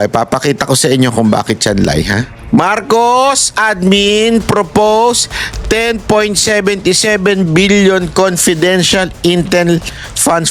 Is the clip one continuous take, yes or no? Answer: no